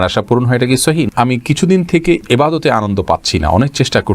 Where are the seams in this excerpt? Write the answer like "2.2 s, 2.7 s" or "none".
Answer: 1.1 s